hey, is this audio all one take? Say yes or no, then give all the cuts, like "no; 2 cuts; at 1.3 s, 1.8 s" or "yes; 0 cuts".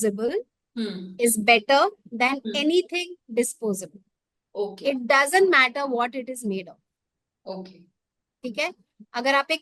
yes; 0 cuts